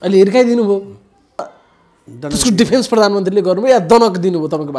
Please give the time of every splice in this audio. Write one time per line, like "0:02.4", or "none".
0:01.4